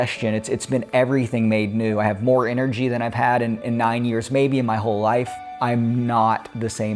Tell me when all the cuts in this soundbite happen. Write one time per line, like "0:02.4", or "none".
0:05.5